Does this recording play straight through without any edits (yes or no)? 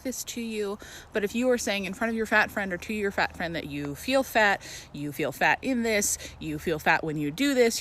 no